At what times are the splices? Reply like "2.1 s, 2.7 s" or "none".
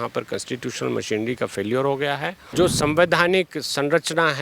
2.4 s